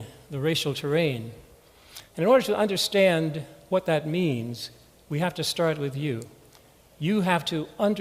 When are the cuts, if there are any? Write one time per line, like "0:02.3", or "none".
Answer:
0:05.4